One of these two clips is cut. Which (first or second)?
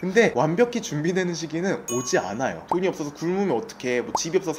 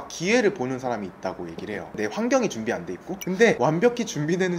second